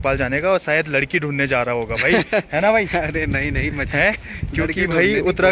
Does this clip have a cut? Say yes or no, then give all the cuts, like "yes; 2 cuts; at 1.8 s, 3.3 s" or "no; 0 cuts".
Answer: no; 0 cuts